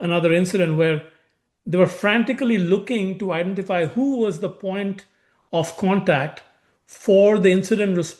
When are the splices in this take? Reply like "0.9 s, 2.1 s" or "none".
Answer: none